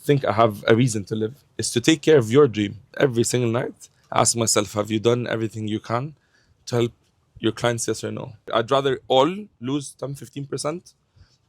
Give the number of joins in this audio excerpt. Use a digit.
2